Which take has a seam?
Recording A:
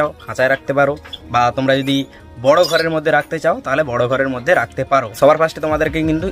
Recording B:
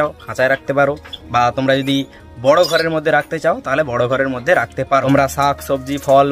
B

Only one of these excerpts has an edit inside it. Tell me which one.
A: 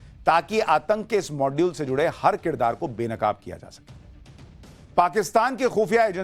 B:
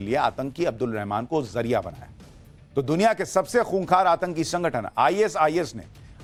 A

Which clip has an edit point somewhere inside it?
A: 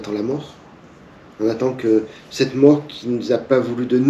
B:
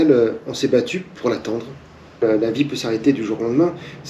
B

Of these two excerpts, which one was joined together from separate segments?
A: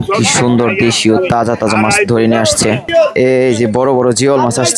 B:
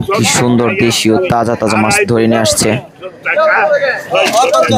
A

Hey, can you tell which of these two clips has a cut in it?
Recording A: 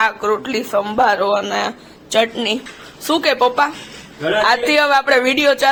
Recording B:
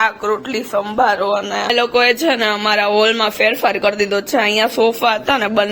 B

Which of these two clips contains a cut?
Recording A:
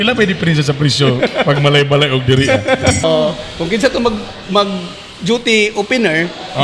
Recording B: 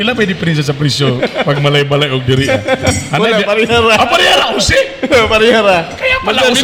A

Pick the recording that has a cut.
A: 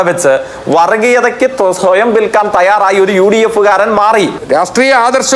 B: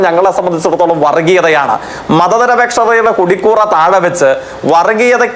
A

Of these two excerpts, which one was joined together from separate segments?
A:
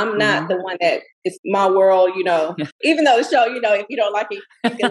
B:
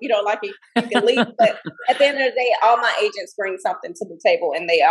A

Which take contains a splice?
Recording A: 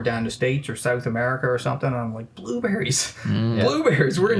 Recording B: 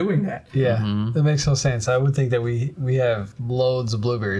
B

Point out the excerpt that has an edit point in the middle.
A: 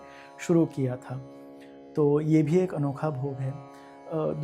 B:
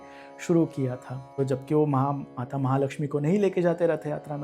B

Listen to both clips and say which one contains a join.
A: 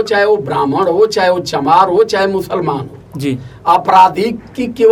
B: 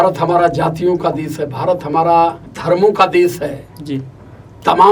B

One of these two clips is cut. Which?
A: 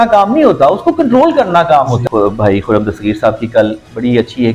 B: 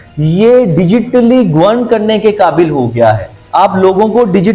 A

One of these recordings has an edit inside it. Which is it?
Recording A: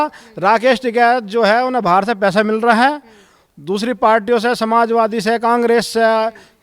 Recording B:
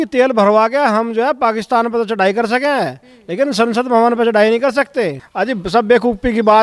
B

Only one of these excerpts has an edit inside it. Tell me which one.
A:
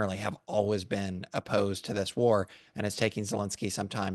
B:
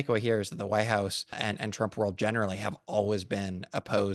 B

